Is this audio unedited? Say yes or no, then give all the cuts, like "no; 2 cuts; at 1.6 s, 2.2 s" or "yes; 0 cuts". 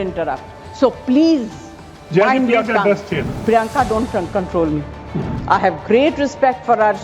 no; 2 cuts; at 3.3 s, 5.3 s